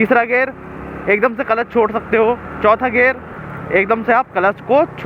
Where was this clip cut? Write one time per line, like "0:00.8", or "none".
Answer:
none